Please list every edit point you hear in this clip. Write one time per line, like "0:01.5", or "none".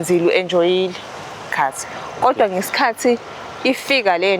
0:01.5